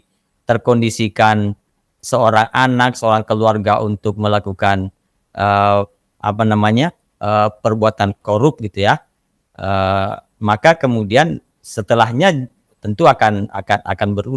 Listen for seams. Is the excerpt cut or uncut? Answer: uncut